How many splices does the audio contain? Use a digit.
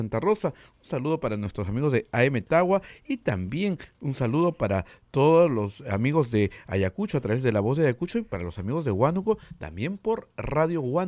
0